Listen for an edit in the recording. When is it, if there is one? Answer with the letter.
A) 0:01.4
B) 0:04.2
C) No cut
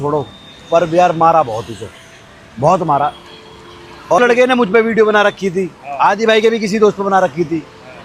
B